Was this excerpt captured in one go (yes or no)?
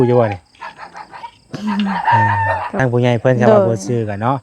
no